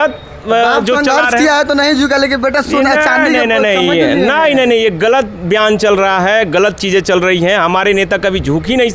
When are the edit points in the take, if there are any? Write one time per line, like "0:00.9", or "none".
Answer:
none